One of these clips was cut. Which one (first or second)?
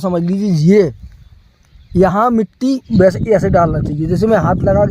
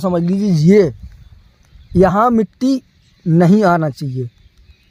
first